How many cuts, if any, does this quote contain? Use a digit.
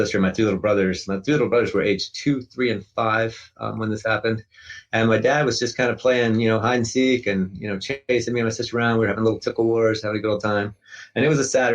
0